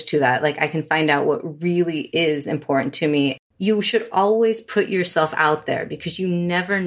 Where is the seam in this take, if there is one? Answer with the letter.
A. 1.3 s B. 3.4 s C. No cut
B